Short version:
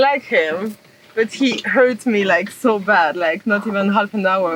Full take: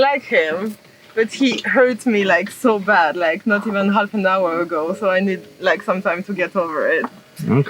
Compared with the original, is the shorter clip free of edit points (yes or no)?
yes